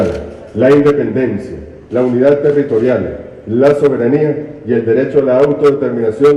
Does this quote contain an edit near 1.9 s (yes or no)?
no